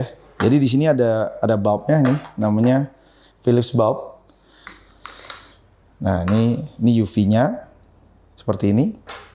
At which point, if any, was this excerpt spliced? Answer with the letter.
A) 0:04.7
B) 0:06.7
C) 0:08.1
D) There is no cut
A